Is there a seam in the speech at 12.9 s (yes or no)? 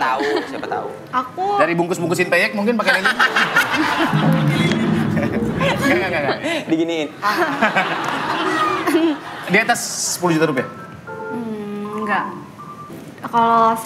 yes